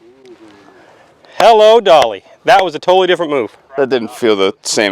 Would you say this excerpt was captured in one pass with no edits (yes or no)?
no